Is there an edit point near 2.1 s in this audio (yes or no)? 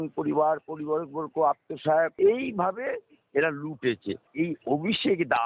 yes